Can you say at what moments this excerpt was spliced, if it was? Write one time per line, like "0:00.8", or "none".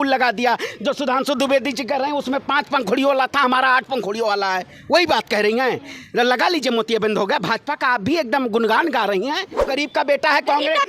0:09.6